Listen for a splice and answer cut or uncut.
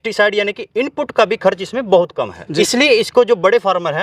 cut